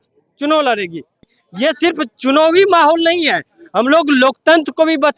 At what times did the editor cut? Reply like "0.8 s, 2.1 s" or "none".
1.3 s